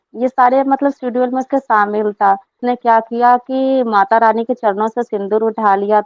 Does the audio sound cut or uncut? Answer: cut